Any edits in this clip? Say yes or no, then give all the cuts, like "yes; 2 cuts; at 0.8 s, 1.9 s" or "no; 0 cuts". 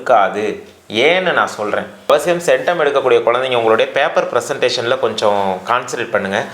yes; 1 cut; at 2.0 s